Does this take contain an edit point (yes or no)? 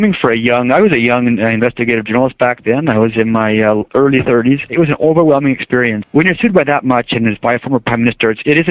yes